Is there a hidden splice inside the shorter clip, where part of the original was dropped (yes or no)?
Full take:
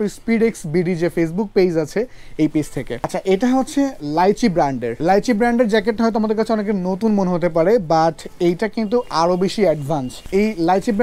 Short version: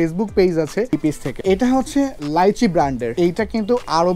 yes